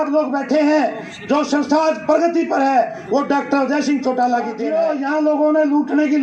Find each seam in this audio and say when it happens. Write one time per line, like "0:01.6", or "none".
0:04.6